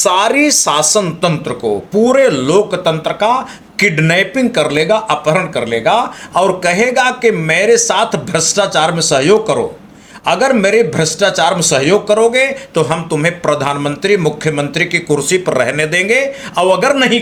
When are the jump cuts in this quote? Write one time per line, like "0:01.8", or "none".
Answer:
none